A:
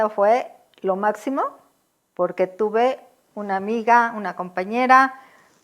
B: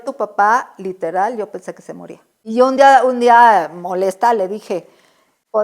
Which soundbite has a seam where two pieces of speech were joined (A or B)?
B